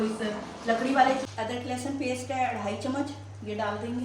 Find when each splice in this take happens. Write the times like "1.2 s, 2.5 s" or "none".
1.2 s